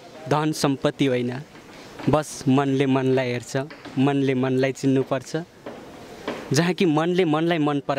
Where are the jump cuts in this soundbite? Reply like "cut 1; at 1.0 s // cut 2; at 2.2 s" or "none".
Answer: none